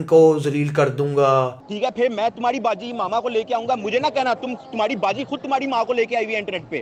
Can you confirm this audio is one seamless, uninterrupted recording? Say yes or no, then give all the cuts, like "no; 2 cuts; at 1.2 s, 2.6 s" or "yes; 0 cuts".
yes; 0 cuts